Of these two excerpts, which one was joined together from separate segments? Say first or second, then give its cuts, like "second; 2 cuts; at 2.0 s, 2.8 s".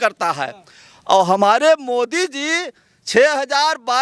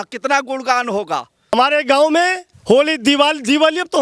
second; 2 cuts; at 1.5 s, 2.5 s